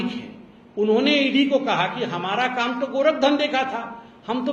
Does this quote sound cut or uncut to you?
uncut